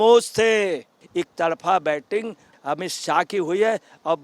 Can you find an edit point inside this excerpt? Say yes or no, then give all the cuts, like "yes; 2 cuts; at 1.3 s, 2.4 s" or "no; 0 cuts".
yes; 1 cut; at 1.0 s